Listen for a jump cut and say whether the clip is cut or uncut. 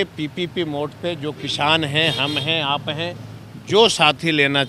uncut